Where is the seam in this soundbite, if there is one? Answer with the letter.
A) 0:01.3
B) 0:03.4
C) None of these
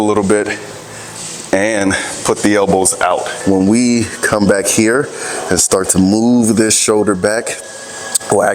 B